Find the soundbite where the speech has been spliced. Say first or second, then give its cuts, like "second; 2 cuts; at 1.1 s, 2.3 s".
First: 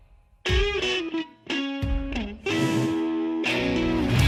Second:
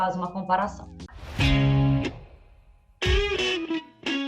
second; 1 cut; at 1.2 s